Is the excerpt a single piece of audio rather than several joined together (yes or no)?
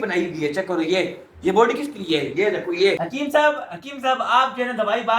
no